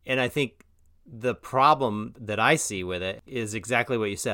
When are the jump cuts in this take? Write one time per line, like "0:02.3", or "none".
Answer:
0:02.1
0:03.2